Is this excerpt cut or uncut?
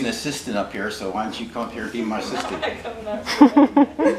uncut